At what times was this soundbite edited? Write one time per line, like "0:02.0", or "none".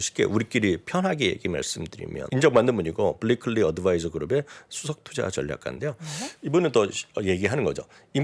0:02.3

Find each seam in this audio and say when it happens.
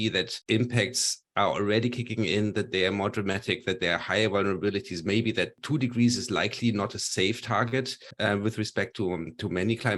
0:05.6
0:08.0

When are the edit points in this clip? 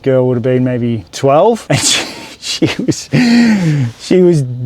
0:01.1
0:01.6

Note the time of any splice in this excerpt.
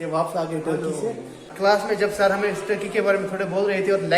0:01.4

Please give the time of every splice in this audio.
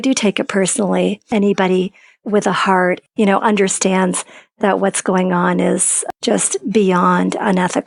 0:01.2
0:03.0
0:06.1

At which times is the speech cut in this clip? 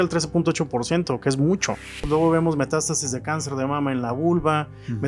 0:02.0

